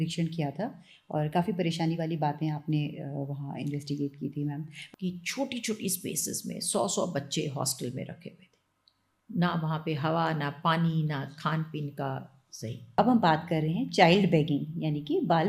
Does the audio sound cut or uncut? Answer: cut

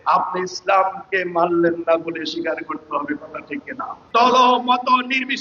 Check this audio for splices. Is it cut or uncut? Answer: cut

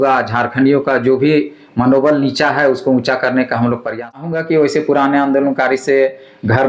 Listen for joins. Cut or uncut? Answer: cut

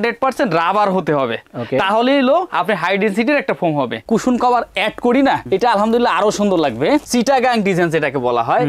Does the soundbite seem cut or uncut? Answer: cut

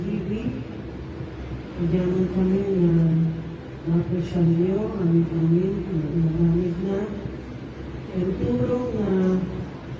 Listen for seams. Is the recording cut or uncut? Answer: uncut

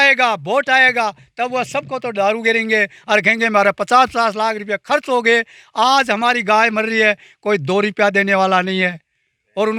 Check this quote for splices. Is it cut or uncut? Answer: uncut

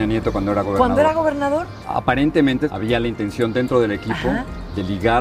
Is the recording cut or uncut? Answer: cut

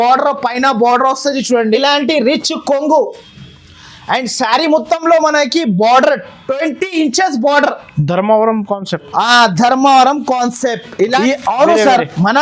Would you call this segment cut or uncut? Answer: cut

